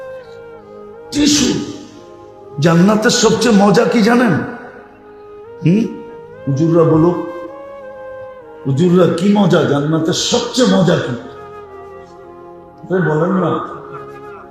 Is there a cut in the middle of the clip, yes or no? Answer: yes